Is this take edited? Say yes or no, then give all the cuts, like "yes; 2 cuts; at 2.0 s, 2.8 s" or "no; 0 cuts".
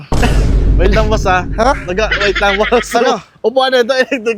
no; 0 cuts